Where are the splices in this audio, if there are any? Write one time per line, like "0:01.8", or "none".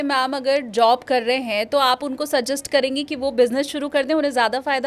none